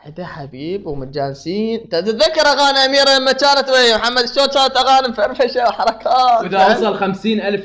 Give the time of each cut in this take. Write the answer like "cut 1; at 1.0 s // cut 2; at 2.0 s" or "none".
cut 1; at 6.5 s